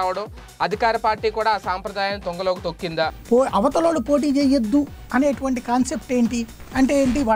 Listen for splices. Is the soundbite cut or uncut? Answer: cut